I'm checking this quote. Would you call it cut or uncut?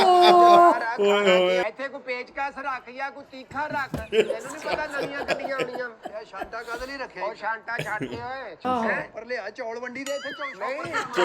cut